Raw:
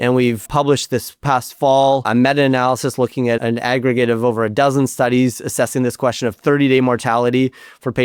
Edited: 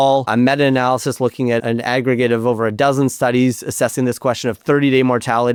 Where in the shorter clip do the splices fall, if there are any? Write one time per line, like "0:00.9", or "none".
none